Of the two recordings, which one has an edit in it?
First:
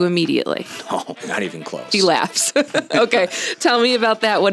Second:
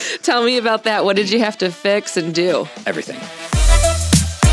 second; 1 cut; at 3.3 s

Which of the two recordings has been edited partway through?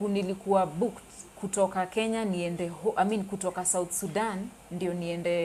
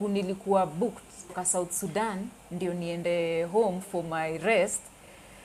second; 1 cut; at 1.4 s

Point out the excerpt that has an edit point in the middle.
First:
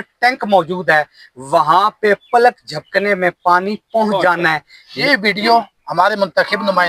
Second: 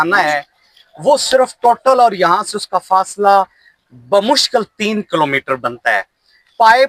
first; 1 cut; at 5.0 s

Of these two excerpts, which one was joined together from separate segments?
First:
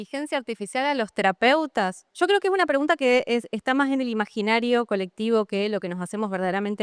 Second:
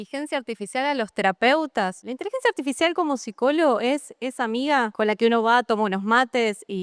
second; 2 cuts; at 2.0 s, 4.9 s

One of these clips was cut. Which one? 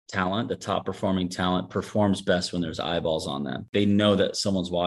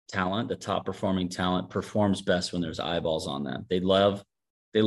first; 1 cut; at 3.6 s

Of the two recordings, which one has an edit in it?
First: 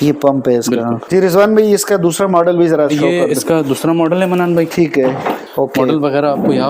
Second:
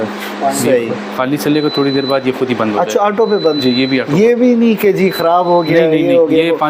first; 2 cuts; at 1.0 s, 5.4 s

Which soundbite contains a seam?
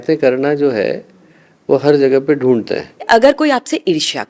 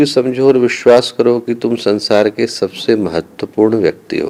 first; 1 cut; at 3.0 s

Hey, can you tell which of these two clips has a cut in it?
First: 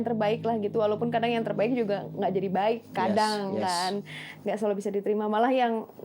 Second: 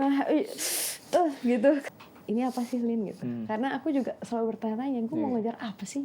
second; 1 cut; at 1.9 s

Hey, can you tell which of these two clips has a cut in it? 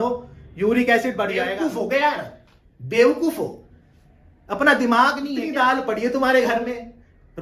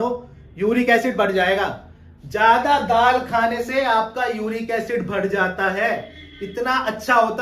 first; 2 cuts; at 1.5 s, 5.4 s

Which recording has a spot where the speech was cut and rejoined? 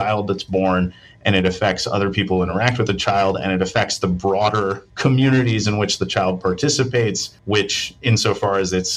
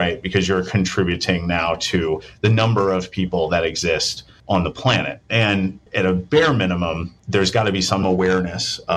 second; 2 cuts; at 5.8 s, 8.0 s

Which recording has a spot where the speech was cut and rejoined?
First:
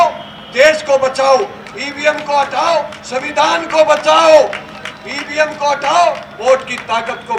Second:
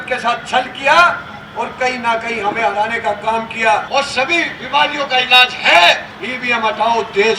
second; 2 cuts; at 3.9 s, 6.2 s

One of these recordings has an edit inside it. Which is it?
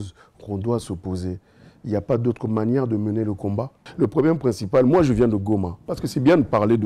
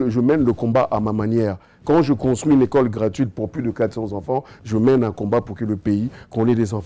first; 1 cut; at 3.8 s

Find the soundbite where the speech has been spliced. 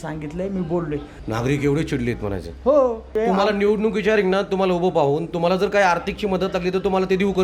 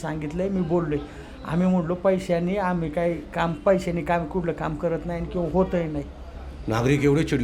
first; 2 cuts; at 1.1 s, 3.1 s

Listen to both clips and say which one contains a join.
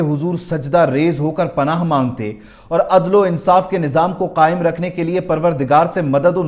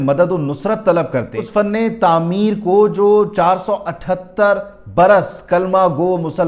second; 1 cut; at 1.4 s

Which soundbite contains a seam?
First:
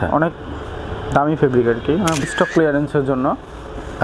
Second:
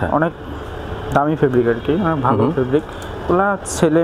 first; 1 cut; at 2.2 s

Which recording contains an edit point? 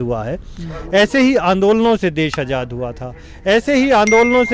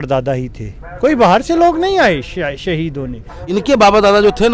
second; 1 cut; at 3.3 s

